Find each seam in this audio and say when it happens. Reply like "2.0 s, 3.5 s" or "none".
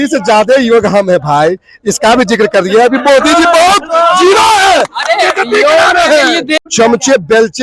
6.5 s